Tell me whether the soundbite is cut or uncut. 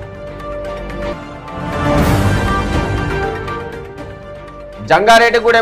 cut